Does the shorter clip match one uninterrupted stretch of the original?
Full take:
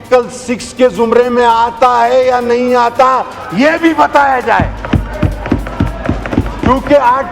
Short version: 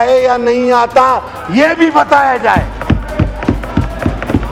yes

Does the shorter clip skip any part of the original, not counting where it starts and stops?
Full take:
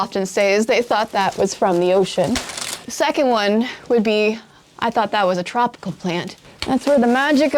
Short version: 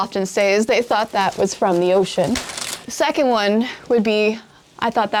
no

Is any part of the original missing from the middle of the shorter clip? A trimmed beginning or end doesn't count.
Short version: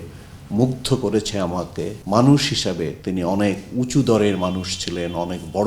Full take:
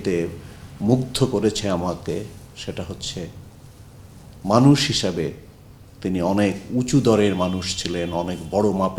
yes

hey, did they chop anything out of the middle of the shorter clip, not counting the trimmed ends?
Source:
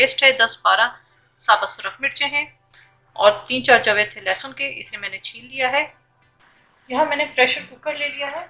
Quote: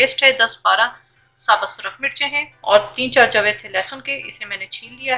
yes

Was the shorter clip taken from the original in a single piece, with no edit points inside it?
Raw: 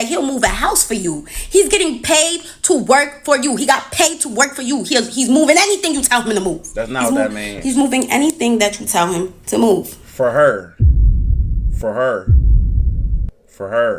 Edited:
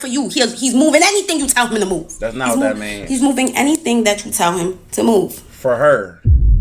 yes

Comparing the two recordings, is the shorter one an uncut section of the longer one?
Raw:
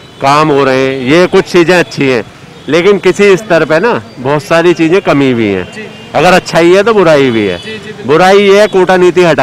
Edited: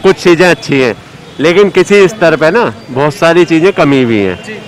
yes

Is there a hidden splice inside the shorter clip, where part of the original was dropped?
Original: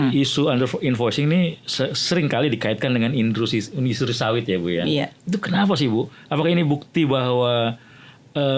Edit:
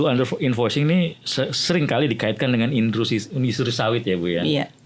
no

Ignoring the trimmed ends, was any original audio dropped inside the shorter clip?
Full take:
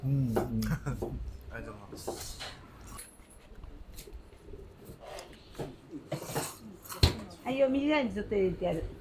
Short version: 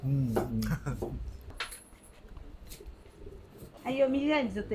yes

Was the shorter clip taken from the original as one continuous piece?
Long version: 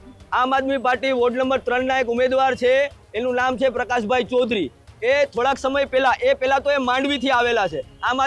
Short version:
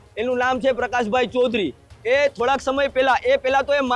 yes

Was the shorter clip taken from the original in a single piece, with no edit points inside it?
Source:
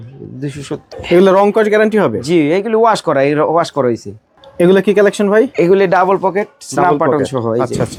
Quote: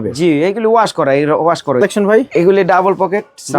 no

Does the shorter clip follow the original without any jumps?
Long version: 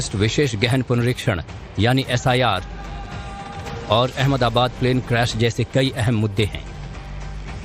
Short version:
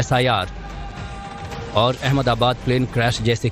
yes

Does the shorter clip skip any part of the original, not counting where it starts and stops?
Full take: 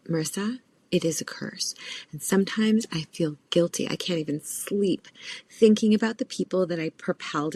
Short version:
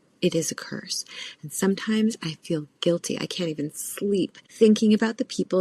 yes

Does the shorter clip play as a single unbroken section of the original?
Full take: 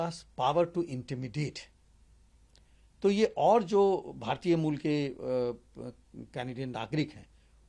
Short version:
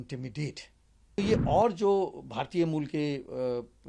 no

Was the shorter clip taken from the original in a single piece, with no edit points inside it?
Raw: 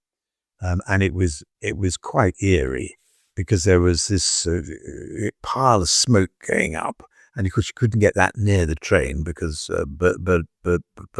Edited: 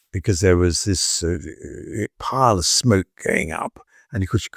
yes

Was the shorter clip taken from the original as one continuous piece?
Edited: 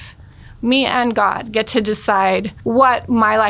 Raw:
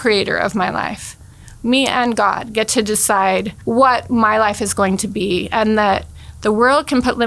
yes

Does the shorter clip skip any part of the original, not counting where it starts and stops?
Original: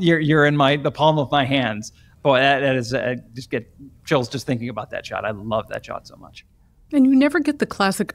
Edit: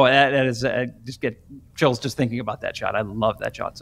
no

